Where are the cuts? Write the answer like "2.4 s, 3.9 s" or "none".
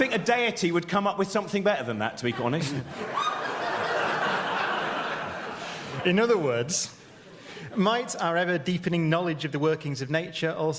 3.9 s